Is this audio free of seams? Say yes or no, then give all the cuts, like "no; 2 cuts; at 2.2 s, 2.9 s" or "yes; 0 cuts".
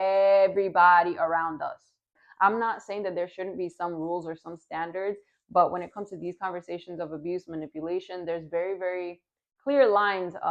no; 1 cut; at 2.1 s